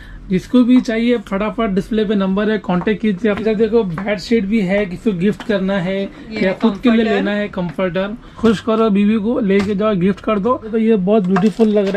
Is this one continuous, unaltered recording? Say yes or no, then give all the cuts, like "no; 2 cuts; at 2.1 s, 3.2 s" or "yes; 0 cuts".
no; 3 cuts; at 3.4 s, 8.2 s, 10.7 s